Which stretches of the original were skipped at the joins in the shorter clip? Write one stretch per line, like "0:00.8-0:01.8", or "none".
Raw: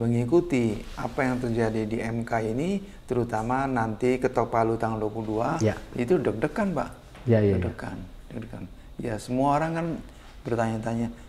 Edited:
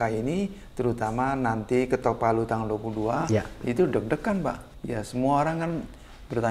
0:07.0-0:08.9